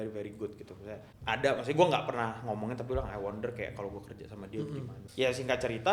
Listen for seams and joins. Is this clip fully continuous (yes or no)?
no